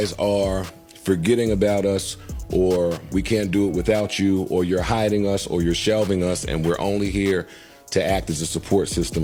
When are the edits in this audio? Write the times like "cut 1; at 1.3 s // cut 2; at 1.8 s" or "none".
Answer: none

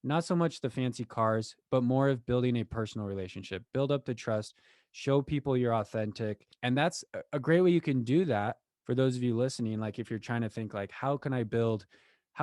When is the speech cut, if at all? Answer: cut 1; at 6.5 s

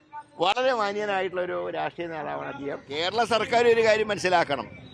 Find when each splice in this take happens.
cut 1; at 2.9 s

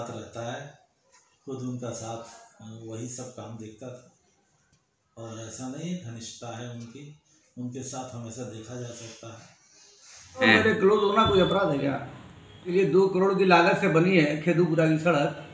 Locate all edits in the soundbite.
cut 1; at 10.4 s // cut 2; at 12.7 s

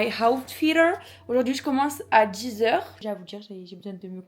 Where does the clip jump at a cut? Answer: cut 1; at 3.0 s

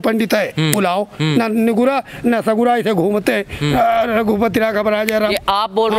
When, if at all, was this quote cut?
none

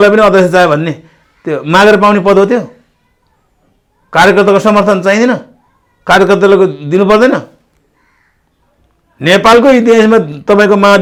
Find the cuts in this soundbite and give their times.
none

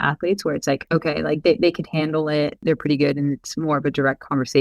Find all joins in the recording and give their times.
cut 1; at 0.8 s // cut 2; at 2.6 s

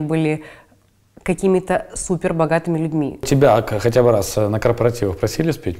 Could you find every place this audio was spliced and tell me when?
cut 1; at 3.2 s

